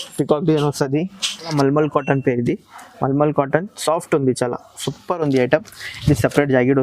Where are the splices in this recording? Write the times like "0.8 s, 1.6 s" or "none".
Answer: 1.5 s